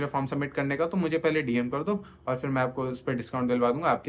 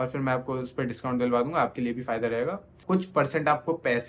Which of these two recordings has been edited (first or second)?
second